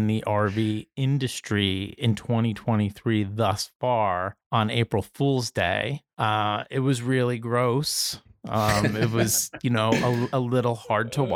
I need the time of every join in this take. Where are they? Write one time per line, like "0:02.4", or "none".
0:04.4
0:06.0